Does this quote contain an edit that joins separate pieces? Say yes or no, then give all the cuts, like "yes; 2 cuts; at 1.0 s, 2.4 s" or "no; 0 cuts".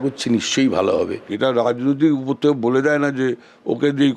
yes; 1 cut; at 1.3 s